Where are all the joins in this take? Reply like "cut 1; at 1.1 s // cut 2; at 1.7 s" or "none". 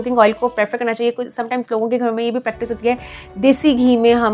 none